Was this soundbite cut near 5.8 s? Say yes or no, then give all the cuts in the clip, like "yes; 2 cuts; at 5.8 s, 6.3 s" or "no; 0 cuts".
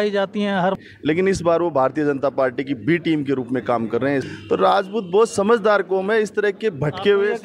no; 2 cuts; at 0.8 s, 4.3 s